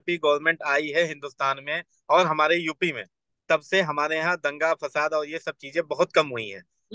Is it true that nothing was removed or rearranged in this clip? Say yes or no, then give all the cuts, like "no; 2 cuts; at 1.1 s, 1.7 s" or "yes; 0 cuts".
yes; 0 cuts